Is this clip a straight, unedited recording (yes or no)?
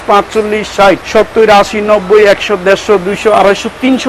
no